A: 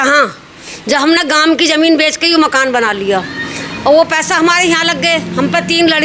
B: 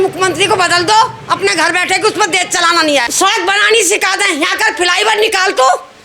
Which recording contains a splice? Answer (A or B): B